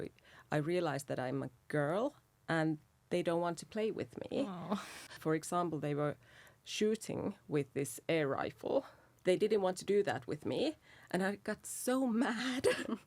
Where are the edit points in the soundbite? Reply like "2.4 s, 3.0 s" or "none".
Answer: 5.1 s, 9.0 s